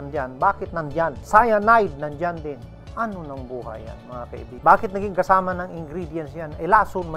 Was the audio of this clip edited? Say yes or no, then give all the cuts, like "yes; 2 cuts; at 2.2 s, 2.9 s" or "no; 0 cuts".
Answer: yes; 2 cuts; at 1.2 s, 4.5 s